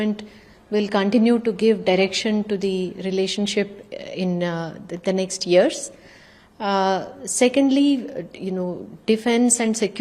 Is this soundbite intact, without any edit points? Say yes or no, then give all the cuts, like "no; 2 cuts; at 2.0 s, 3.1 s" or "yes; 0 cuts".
yes; 0 cuts